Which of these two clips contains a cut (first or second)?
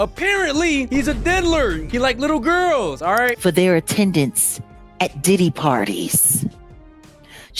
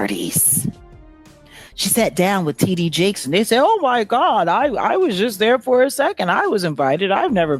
first